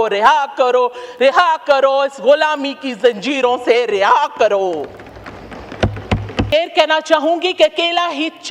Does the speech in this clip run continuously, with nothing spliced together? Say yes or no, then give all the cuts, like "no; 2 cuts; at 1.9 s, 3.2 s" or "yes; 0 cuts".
no; 1 cut; at 6.5 s